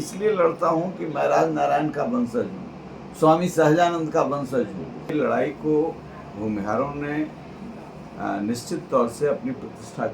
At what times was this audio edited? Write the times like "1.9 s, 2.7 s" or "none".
5.1 s